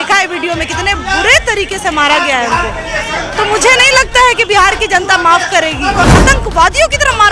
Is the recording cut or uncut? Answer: cut